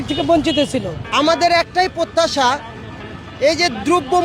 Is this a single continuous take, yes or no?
no